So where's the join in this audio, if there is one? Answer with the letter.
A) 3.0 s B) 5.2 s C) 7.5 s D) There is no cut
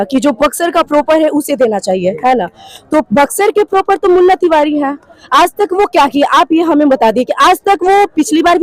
D